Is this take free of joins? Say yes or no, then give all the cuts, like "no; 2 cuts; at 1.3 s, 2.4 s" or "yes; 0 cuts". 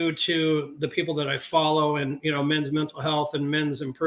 yes; 0 cuts